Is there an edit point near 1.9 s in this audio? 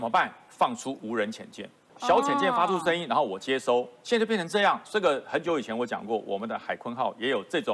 yes; 1 cut; at 1.9 s

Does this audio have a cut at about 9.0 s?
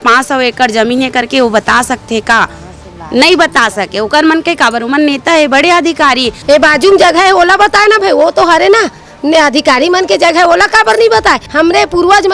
no; 2 cuts; at 6.3 s, 11.4 s

